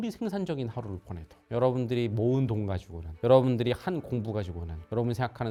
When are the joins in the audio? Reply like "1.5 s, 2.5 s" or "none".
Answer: none